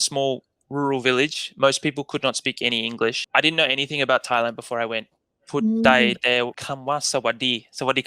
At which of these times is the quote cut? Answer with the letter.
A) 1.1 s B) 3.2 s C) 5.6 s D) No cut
B